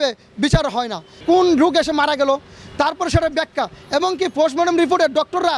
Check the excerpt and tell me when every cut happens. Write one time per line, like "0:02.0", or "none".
0:01.2